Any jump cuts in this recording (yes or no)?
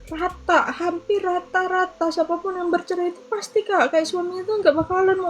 no